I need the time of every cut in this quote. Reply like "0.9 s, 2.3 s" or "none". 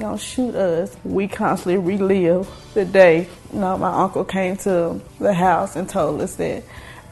1.0 s, 2.6 s, 3.4 s, 5.0 s